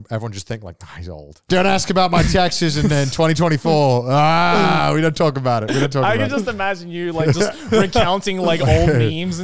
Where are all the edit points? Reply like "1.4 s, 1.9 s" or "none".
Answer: 1.5 s

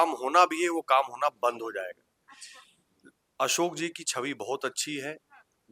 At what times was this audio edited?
none

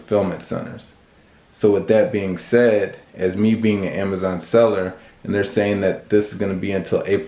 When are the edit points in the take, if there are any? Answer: none

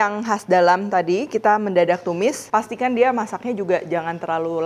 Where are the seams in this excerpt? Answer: 2.4 s

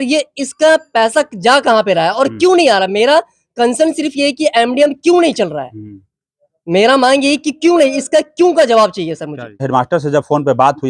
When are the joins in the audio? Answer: 9.6 s

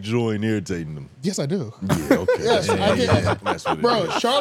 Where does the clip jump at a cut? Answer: none

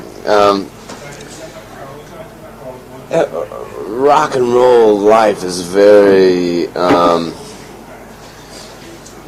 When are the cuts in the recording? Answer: none

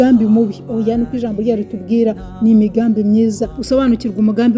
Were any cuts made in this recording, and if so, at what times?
3.5 s

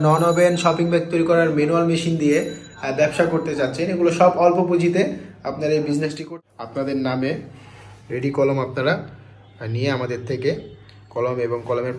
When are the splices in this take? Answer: 6.2 s

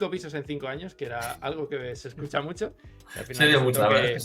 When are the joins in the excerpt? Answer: none

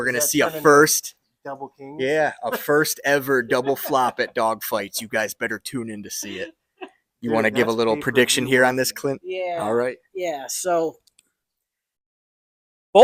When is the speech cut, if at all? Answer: none

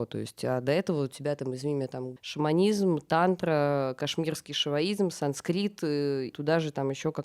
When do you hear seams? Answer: 2.1 s, 6.3 s

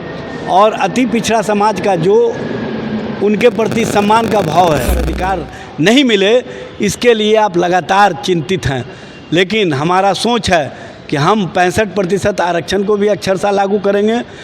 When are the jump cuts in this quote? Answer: 5.2 s

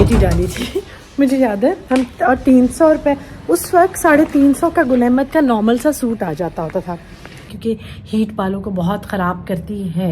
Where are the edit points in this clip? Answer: 7.5 s

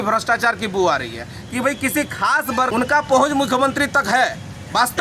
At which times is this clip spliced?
2.7 s

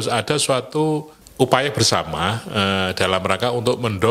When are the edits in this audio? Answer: none

